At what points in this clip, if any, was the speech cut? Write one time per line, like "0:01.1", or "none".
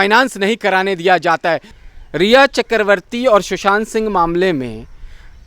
0:01.7